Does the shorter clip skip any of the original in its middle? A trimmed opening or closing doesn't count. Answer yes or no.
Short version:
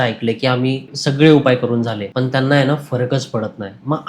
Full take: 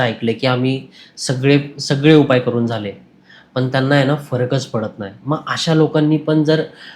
yes